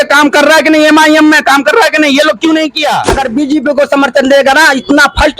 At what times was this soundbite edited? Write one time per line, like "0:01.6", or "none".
0:03.1

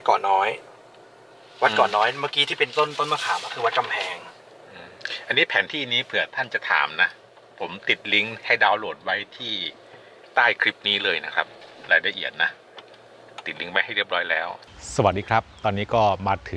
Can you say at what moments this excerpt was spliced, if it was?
none

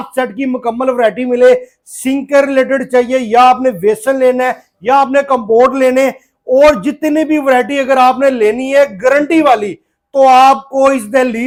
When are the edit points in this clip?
none

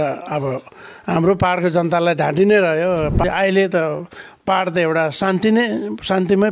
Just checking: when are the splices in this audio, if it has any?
0:03.2

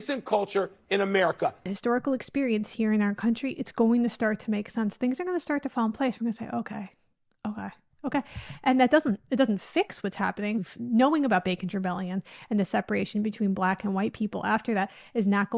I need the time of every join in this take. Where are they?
0:01.8

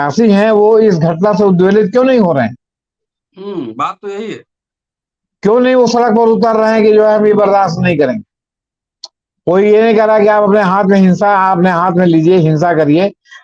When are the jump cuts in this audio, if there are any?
none

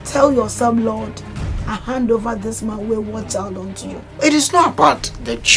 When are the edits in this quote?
0:04.0

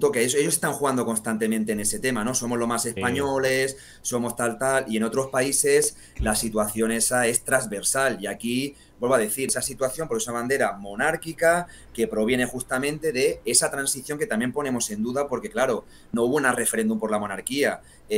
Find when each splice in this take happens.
0:09.5

